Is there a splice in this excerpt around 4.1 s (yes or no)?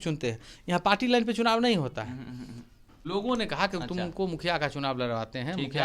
no